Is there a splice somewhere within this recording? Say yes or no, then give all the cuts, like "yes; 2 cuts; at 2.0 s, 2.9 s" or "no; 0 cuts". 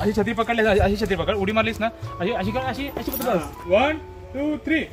yes; 1 cut; at 3.7 s